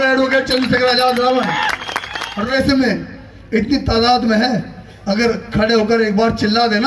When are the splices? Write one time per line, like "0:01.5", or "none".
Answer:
0:02.5

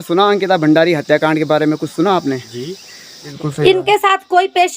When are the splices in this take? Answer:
0:03.2

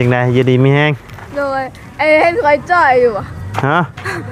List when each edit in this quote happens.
none

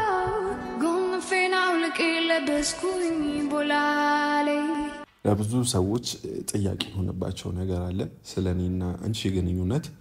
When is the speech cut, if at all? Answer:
0:05.1

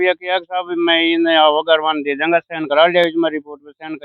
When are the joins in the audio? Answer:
none

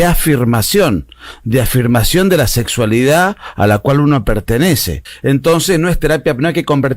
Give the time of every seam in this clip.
0:05.1

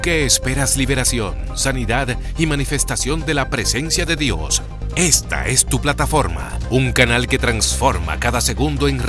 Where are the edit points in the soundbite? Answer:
none

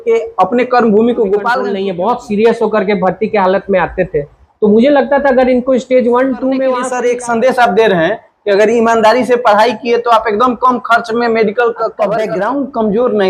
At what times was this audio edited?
0:01.7
0:06.9
0:12.3

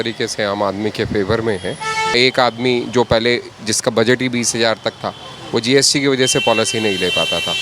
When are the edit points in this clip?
0:02.1

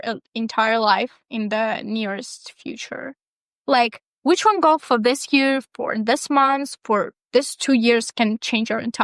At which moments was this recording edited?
none

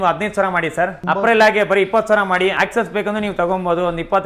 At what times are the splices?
0:01.0
0:02.5

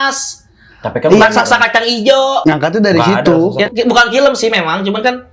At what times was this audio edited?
0:02.4
0:03.7

